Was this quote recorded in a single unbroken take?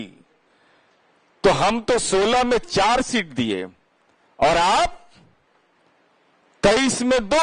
yes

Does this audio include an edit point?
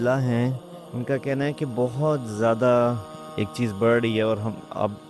no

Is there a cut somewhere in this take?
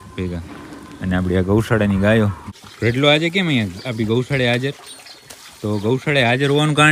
yes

